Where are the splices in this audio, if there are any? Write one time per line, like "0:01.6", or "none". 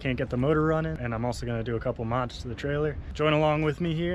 0:01.0
0:03.0